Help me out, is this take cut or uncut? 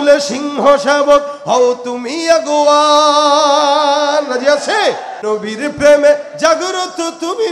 cut